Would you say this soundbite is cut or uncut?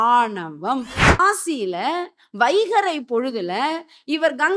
cut